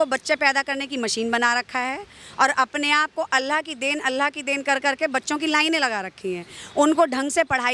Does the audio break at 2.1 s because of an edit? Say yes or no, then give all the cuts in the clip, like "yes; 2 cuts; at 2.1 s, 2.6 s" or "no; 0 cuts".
no; 0 cuts